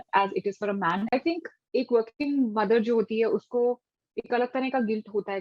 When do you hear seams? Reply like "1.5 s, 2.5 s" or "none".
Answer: 1.1 s